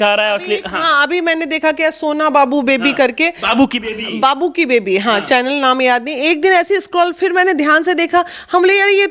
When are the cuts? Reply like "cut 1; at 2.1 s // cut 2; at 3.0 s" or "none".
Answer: none

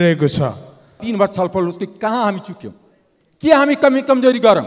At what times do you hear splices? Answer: cut 1; at 1.0 s

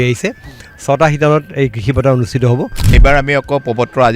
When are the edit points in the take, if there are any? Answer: cut 1; at 3.0 s

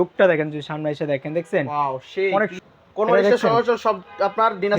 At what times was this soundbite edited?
cut 1; at 2.6 s

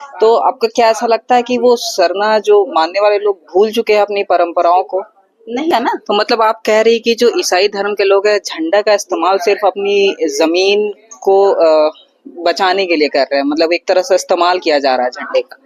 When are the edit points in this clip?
cut 1; at 5.7 s

